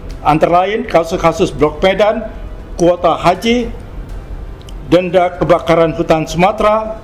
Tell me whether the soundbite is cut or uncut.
uncut